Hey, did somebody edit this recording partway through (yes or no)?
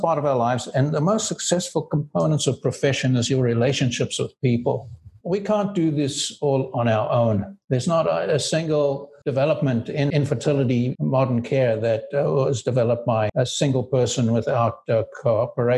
no